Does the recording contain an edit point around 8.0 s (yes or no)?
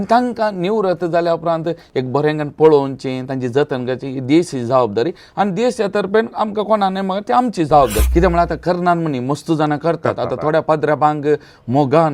yes